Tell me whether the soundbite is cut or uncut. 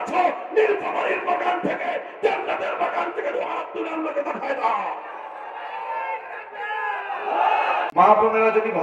cut